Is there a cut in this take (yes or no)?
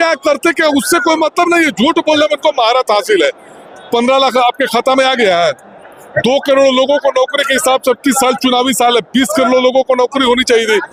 no